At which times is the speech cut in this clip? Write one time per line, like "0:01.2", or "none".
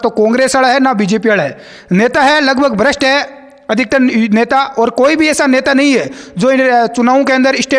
none